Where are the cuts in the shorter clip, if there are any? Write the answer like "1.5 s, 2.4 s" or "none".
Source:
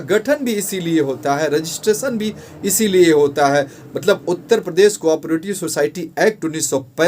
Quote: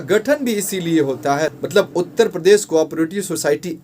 1.5 s